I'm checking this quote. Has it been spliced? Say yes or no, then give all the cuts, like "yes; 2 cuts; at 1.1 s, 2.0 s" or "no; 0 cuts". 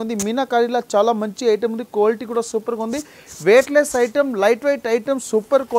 no; 0 cuts